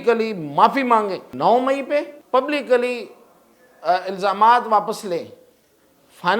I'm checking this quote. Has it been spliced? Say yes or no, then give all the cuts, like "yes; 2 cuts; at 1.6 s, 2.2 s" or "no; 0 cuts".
yes; 2 cuts; at 1.3 s, 2.2 s